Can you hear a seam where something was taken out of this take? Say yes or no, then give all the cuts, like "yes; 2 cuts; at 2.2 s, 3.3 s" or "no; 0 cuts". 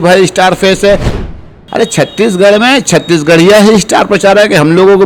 yes; 1 cut; at 1.3 s